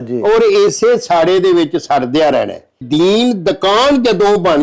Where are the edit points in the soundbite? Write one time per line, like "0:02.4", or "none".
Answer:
0:02.8